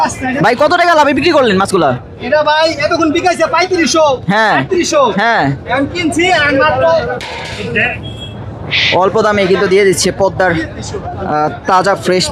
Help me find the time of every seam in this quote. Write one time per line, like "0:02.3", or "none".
none